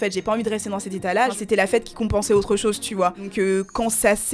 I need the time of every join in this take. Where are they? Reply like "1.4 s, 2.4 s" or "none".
1.4 s, 3.2 s